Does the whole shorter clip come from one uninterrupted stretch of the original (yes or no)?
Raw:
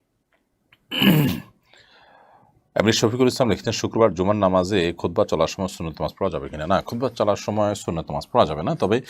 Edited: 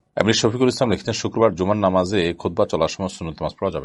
yes